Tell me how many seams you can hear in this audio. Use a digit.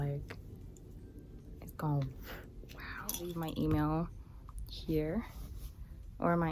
1